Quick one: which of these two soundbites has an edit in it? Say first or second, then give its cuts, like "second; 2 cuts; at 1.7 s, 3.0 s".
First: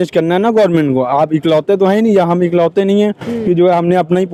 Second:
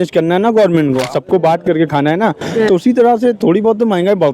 second; 1 cut; at 1.1 s